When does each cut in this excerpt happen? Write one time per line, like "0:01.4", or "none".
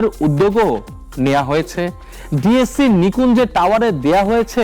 none